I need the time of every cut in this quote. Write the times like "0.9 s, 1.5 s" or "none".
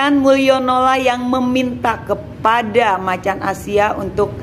none